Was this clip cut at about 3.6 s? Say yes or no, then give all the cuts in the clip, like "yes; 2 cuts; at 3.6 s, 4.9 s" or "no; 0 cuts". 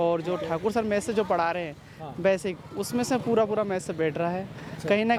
no; 0 cuts